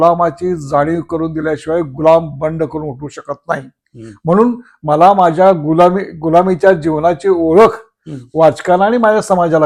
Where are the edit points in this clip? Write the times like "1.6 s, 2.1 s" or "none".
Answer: none